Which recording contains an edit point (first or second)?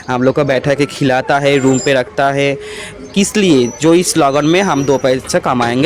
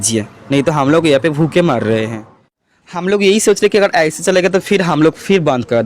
second